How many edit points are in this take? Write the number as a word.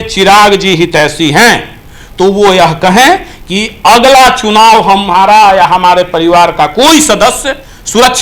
zero